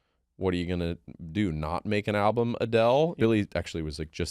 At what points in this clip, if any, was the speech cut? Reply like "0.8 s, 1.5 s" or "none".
3.1 s